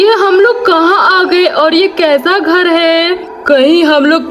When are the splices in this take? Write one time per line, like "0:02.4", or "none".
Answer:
0:03.3